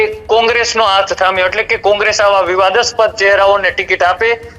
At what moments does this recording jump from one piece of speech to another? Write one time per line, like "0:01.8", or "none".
none